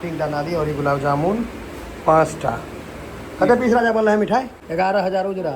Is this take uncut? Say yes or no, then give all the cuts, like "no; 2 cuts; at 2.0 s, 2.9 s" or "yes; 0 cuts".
no; 1 cut; at 4.6 s